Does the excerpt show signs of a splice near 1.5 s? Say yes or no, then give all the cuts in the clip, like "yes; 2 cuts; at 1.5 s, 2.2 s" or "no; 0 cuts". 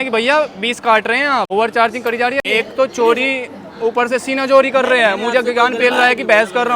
yes; 2 cuts; at 1.5 s, 2.4 s